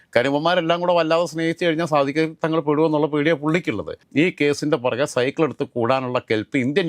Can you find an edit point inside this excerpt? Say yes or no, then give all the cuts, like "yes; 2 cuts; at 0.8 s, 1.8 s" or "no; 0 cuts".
yes; 1 cut; at 4.0 s